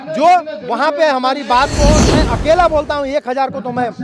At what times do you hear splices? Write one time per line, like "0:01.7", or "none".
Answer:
0:02.1